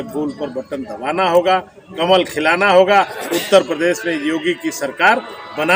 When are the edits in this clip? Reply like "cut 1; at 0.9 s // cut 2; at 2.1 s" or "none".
none